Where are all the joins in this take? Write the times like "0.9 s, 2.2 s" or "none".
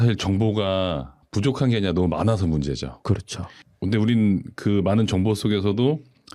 3.7 s